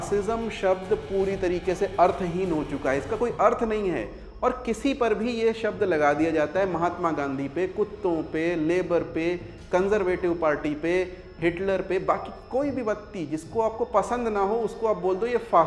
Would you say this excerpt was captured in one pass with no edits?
yes; 0 cuts

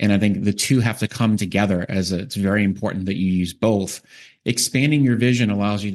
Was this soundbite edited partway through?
no; 0 cuts

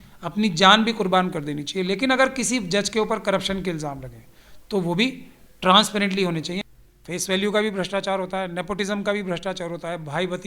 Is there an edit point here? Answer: yes; 1 cut; at 6.6 s

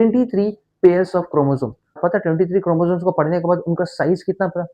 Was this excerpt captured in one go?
no; 1 cut; at 2.0 s

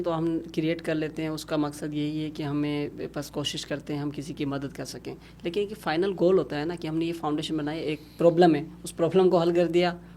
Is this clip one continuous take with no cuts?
yes; 0 cuts

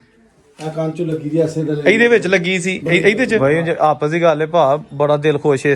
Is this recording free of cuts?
no; 1 cut; at 3.4 s

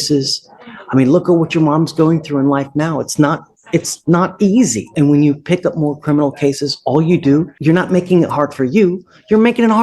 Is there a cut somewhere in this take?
yes; 2 cuts; at 4.8 s, 7.5 s

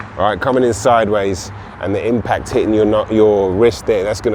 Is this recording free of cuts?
yes; 0 cuts

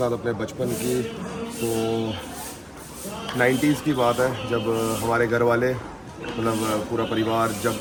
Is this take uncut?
yes; 0 cuts

